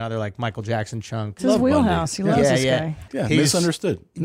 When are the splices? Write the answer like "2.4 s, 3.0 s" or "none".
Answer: 1.3 s, 3.1 s